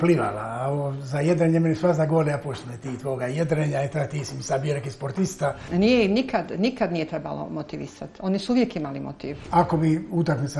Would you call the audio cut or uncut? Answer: cut